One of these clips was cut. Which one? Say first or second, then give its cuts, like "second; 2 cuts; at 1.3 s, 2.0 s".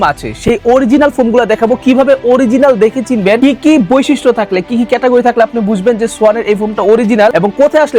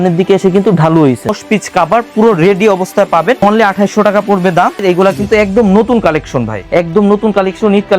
second; 4 cuts; at 1.3 s, 3.4 s, 4.8 s, 6.6 s